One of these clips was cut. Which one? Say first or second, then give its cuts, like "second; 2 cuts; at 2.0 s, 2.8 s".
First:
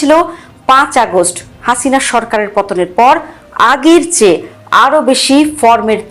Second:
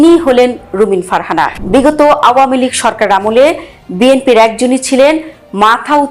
second; 1 cut; at 1.6 s